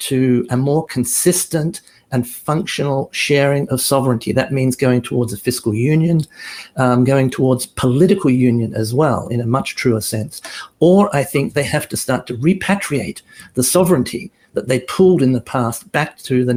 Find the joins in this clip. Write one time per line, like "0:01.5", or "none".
none